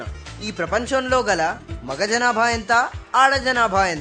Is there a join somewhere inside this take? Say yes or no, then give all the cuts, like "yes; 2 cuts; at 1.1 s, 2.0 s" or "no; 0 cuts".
no; 0 cuts